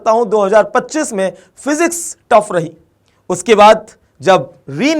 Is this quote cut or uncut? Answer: uncut